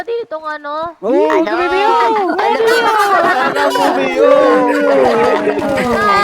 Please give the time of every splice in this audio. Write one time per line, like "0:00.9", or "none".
0:01.0